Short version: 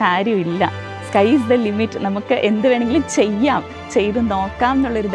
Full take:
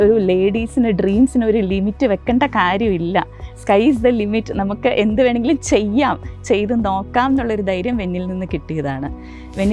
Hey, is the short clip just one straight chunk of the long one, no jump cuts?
yes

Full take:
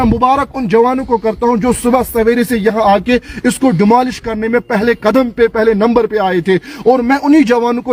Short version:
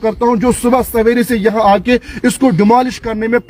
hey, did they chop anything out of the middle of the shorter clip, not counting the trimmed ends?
no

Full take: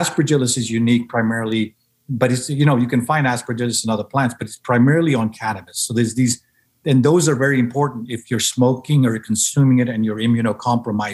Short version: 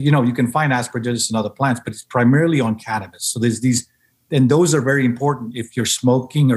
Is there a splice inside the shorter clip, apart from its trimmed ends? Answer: no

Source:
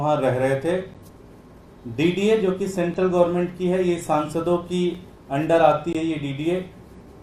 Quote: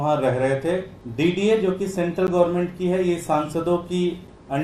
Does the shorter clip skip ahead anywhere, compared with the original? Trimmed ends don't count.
yes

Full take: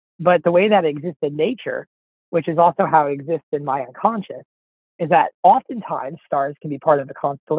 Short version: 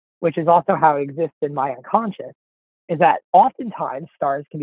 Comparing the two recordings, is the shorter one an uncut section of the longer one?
yes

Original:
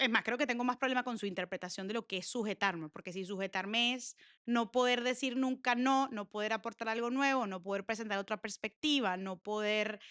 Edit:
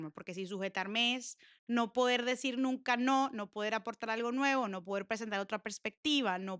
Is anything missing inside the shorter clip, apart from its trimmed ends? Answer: no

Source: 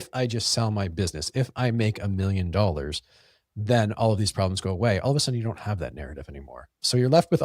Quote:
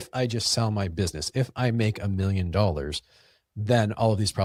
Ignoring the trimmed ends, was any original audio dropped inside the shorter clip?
no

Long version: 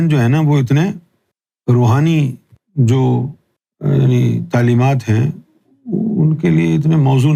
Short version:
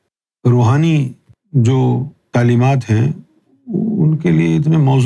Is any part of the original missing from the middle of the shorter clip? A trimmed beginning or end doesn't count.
yes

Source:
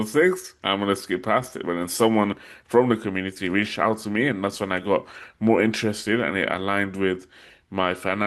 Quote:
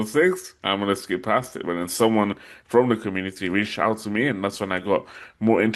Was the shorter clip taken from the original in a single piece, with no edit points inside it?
yes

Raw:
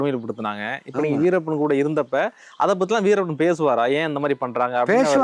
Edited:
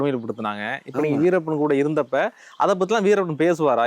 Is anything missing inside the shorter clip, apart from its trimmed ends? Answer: no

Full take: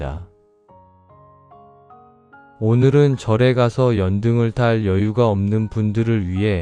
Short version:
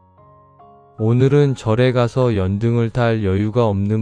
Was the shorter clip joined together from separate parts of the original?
yes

